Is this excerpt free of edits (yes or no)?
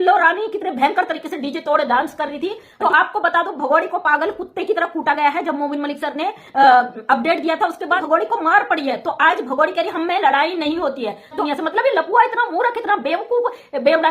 no